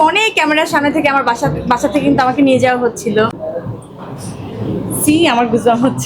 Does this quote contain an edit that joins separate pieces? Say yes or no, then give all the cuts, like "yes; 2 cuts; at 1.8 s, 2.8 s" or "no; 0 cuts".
yes; 1 cut; at 3.4 s